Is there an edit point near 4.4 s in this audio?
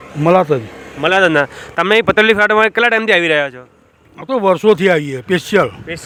no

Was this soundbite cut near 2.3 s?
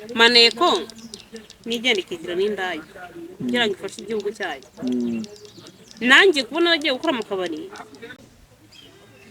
no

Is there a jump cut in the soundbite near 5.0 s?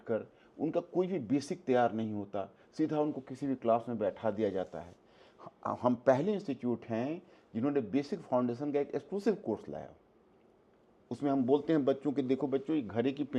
no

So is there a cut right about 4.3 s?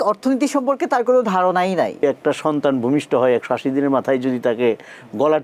no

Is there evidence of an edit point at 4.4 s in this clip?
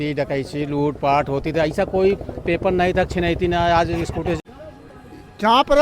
yes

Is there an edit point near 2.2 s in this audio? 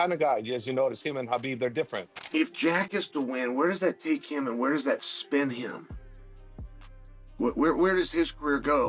yes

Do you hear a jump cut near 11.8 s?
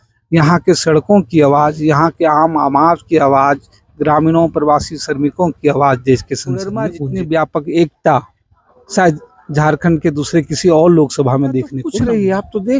yes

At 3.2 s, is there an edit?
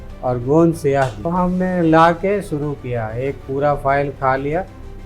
no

